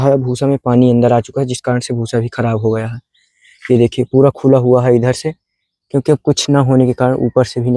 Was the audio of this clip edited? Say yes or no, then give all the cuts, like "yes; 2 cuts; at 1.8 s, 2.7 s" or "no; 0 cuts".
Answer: no; 0 cuts